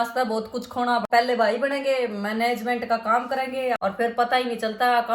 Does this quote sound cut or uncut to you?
cut